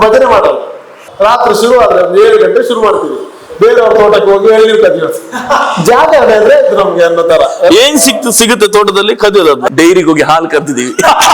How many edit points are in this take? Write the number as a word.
two